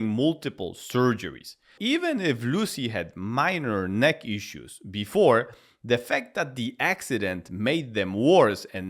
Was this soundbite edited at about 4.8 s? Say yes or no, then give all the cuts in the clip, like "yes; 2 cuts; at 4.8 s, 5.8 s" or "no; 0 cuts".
no; 1 cut; at 1.8 s